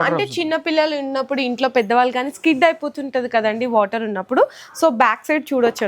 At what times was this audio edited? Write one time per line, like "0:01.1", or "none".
none

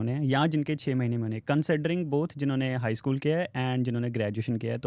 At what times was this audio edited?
none

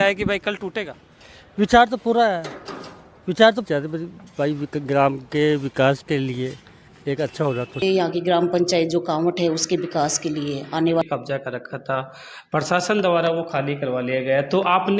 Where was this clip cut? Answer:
0:03.7
0:07.8
0:11.0

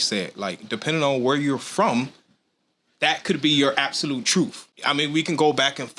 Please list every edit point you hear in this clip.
0:04.7

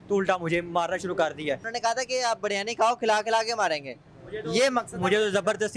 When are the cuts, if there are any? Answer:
0:01.7

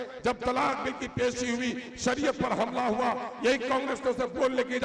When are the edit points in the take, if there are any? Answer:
none

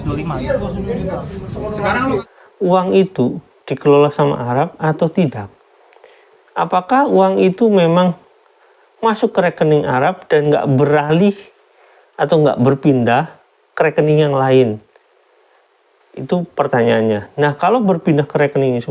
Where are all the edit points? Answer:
0:02.3

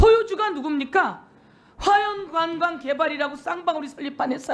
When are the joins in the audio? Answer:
none

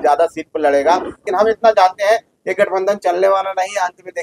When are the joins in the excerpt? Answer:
0:01.2

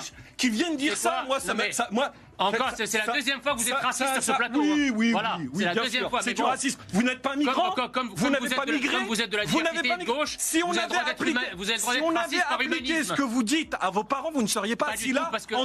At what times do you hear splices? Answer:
none

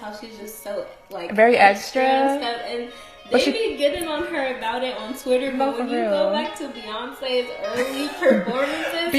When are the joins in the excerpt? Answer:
none

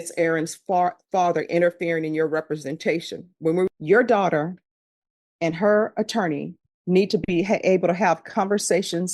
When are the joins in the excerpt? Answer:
0:03.7

